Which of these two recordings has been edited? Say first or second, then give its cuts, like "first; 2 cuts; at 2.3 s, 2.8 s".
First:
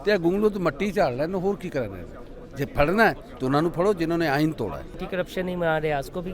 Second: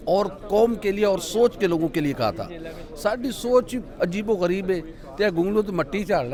first; 1 cut; at 5.0 s